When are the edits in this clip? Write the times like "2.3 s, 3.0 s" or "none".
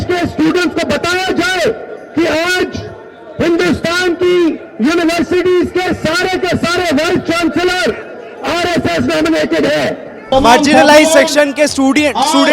10.2 s